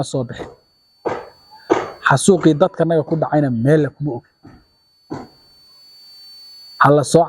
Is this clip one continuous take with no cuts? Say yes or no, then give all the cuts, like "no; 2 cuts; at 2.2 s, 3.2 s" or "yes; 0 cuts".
yes; 0 cuts